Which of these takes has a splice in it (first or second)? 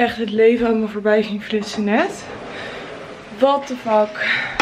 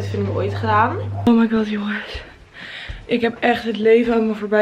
second